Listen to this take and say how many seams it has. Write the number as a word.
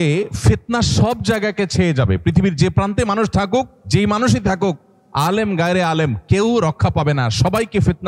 one